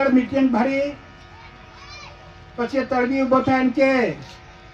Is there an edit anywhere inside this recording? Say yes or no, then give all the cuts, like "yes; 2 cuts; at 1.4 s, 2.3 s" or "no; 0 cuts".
no; 0 cuts